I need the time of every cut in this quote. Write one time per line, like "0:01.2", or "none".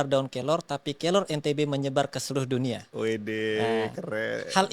none